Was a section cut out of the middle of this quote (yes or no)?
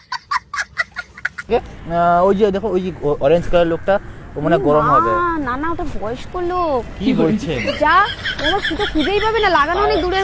yes